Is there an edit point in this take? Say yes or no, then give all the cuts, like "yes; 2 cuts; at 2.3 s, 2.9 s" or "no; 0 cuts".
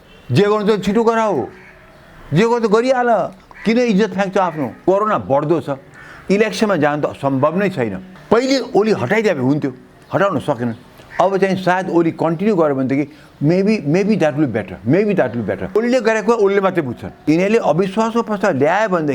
yes; 4 cuts; at 4.8 s, 8.1 s, 15.8 s, 17.1 s